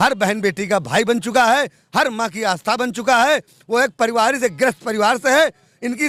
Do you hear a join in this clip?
no; 0 cuts

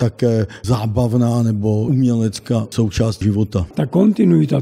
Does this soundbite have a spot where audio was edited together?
yes; 1 cut; at 3.7 s

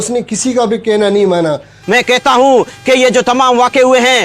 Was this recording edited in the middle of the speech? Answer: yes; 1 cut; at 1.8 s

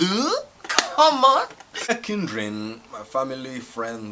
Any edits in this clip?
yes; 1 cut; at 2.0 s

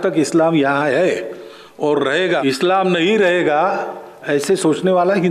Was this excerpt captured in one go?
no; 1 cut; at 2.4 s

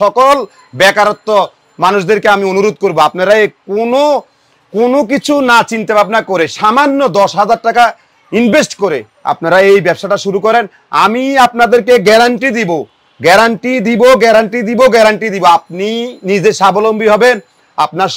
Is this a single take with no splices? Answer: yes; 0 cuts

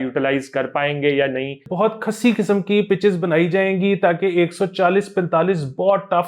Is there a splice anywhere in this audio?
yes; 1 cut; at 1.7 s

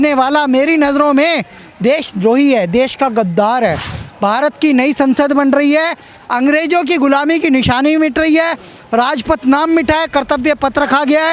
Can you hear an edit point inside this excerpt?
no; 0 cuts

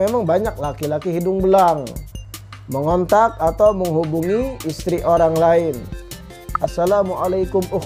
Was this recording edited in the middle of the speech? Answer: no; 0 cuts

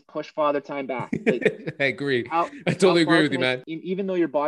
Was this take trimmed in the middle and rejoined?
yes; 1 cut; at 3.6 s

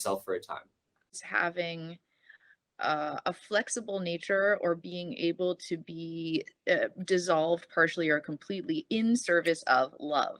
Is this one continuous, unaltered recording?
no; 1 cut; at 1.1 s

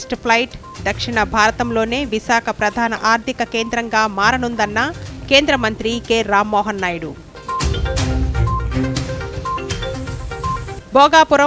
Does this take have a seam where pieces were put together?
no; 0 cuts

